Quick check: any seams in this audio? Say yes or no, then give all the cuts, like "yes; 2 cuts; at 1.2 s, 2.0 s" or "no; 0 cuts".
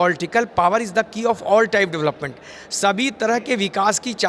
no; 0 cuts